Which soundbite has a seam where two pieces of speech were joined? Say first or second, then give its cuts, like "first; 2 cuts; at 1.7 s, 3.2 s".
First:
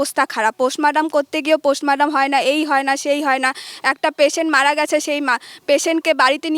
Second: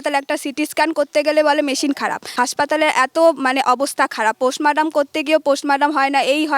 second; 1 cut; at 2.2 s